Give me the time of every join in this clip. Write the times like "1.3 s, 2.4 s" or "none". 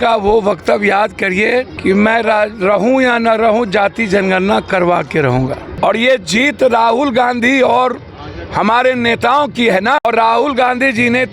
1.7 s, 5.7 s, 10.0 s